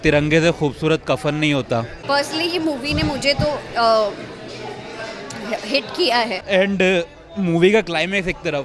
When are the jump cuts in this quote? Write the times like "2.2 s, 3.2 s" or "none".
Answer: 1.9 s, 6.4 s